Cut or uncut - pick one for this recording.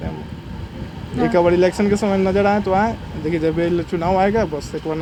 uncut